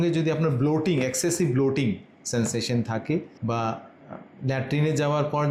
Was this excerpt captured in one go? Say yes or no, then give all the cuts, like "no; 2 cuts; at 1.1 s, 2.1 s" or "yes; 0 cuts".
yes; 0 cuts